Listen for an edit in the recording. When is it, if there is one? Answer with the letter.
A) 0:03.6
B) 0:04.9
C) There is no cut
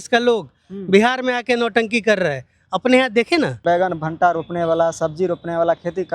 A